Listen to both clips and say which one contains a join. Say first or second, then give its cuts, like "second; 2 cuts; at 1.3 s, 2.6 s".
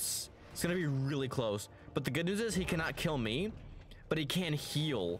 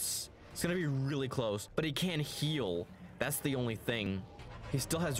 second; 2 cuts; at 1.6 s, 4.0 s